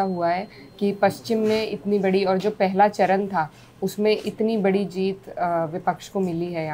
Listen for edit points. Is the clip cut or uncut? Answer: uncut